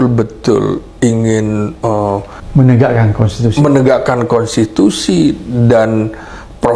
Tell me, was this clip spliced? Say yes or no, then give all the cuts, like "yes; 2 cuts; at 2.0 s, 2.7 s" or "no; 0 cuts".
no; 0 cuts